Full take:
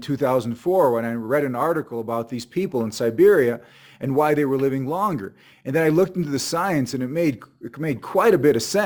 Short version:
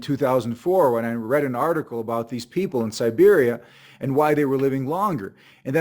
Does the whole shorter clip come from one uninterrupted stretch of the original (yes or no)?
yes